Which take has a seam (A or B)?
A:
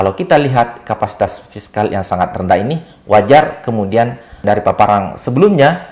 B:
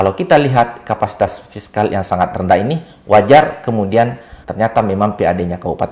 B